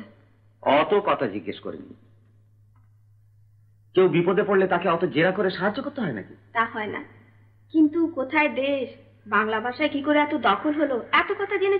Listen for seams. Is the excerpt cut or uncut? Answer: uncut